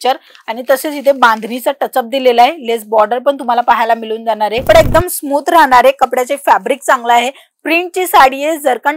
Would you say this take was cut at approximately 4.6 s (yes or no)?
yes